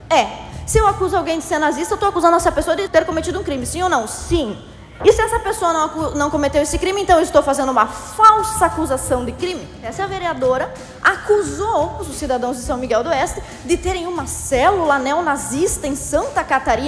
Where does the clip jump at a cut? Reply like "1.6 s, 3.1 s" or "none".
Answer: 2.8 s, 9.9 s, 12.0 s